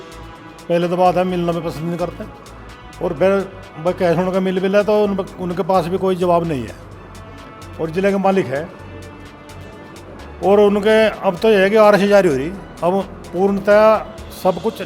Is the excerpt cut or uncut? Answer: uncut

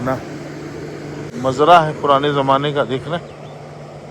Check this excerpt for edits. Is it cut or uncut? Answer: cut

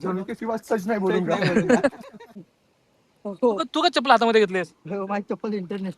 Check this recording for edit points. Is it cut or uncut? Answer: cut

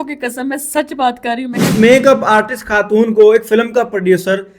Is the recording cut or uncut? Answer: cut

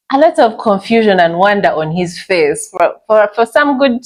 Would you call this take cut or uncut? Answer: uncut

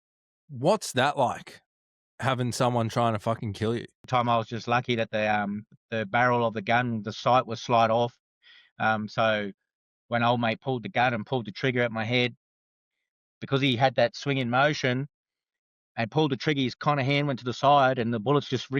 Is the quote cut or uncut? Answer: cut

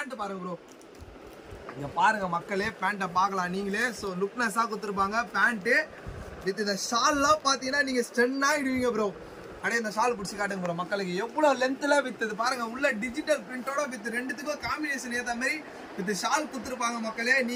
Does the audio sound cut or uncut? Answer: uncut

